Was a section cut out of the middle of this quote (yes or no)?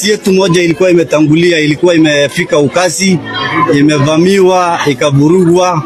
no